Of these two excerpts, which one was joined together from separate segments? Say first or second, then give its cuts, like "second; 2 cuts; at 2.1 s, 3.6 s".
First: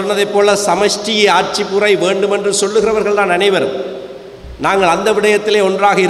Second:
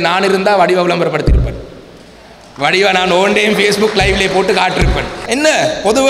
second; 1 cut; at 5.2 s